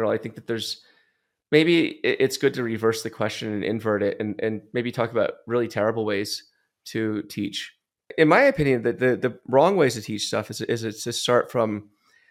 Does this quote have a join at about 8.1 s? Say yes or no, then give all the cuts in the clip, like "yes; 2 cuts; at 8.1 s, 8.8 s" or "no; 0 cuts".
yes; 1 cut; at 8.1 s